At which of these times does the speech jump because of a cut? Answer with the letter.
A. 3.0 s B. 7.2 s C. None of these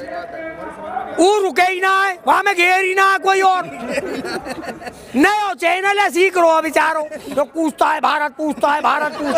B